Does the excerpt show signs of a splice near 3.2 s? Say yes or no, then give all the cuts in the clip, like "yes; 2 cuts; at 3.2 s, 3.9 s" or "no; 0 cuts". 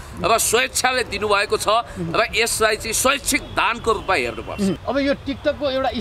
no; 1 cut; at 4.8 s